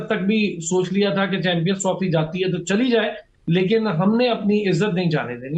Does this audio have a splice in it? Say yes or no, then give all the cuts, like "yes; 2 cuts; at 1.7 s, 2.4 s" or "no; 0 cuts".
no; 0 cuts